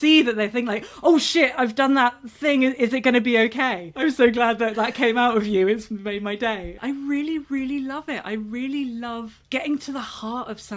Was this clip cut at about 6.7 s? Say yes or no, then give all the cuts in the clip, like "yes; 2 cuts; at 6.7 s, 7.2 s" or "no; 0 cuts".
yes; 2 cuts; at 3.9 s, 6.7 s